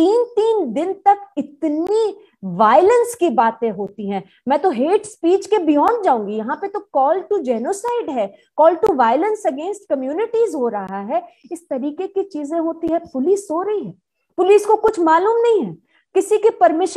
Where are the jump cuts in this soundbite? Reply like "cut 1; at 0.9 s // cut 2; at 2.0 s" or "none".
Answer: none